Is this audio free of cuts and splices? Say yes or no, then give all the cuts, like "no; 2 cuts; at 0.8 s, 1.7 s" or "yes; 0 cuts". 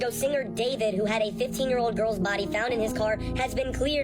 yes; 0 cuts